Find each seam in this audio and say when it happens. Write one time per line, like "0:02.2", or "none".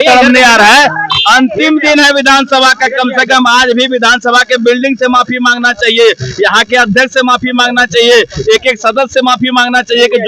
none